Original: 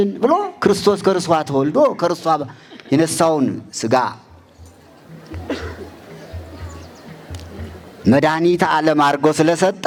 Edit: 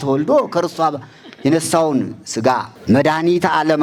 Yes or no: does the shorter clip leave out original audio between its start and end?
yes